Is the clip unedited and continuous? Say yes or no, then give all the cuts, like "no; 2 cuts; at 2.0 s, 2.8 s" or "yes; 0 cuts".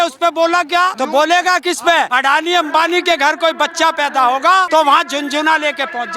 no; 3 cuts; at 0.9 s, 2.1 s, 4.7 s